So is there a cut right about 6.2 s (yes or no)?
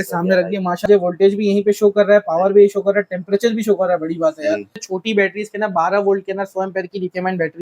no